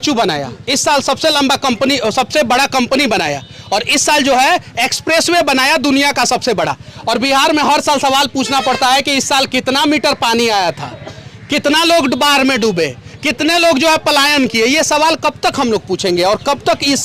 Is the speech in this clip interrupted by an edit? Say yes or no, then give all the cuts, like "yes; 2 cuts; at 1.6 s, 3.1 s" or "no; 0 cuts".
no; 0 cuts